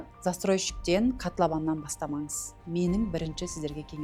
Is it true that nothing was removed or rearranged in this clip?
yes; 0 cuts

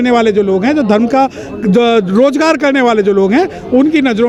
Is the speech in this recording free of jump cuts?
yes; 0 cuts

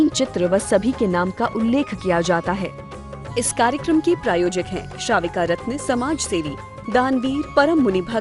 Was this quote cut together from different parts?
yes; 1 cut; at 2.7 s

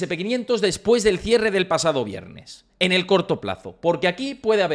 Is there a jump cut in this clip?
no; 0 cuts

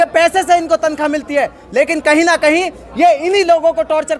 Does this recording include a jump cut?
no; 0 cuts

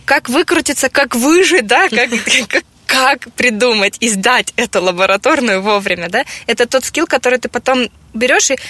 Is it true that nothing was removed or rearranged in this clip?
no; 1 cut; at 0.9 s

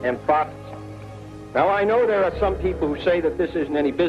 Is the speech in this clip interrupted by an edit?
no; 0 cuts

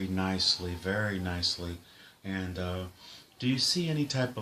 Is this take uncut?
no; 1 cut; at 1.3 s

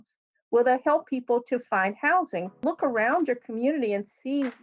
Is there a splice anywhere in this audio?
yes; 1 cut; at 2.6 s

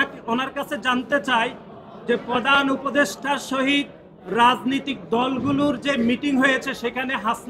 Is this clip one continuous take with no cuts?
yes; 0 cuts

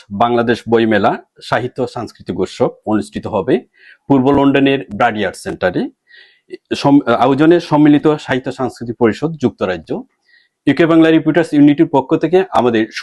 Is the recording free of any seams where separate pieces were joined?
yes; 0 cuts

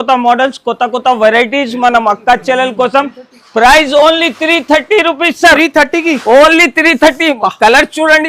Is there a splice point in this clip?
no; 0 cuts

